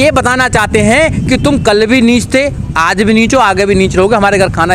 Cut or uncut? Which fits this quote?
uncut